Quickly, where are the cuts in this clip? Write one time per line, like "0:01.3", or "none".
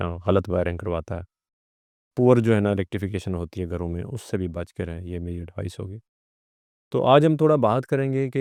none